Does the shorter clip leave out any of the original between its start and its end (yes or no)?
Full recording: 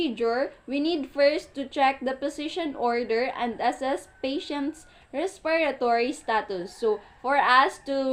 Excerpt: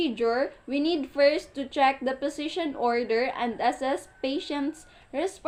no